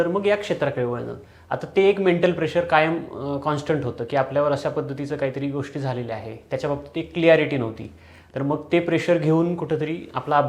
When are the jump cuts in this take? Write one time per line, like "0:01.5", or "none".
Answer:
none